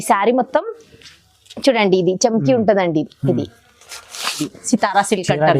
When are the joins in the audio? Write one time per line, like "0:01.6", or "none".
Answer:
0:04.5